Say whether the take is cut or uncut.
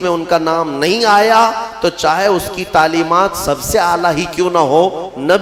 uncut